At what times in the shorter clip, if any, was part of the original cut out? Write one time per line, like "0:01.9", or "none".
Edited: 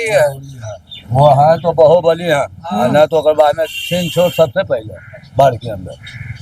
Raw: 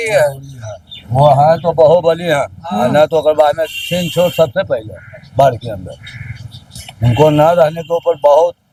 none

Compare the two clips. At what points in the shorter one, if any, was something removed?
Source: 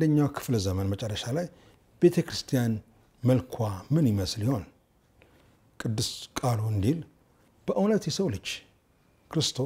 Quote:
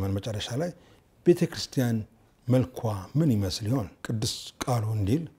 0:04.0

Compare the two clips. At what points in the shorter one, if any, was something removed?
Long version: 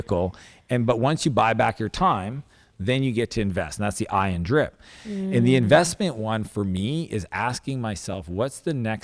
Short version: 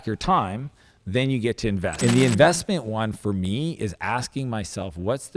0:02.0

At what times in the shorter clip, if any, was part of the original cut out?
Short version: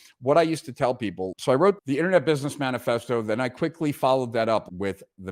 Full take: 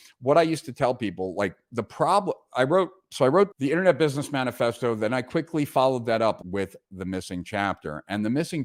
0:01.3

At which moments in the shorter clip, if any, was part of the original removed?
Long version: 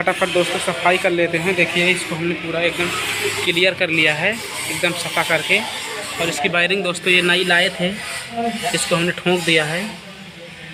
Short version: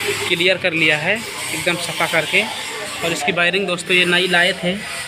none

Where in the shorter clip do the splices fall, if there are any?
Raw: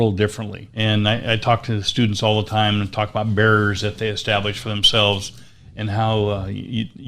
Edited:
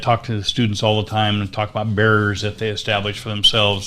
none

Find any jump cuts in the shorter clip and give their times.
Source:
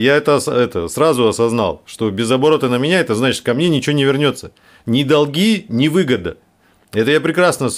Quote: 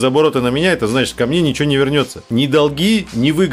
0:02.2

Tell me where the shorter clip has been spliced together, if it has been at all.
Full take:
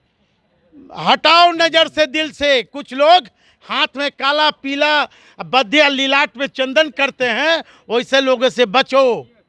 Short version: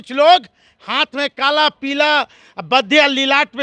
none

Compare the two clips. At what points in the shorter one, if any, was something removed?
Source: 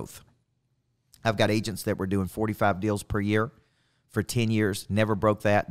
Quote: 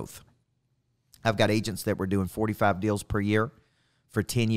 none

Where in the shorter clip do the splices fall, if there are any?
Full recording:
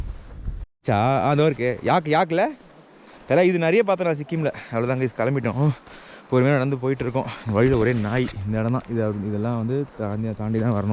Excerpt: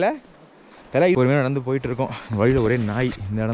0:01.2

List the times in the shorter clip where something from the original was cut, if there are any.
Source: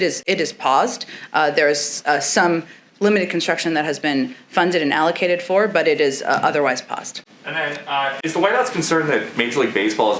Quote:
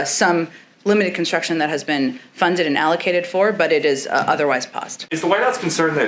0:05.1

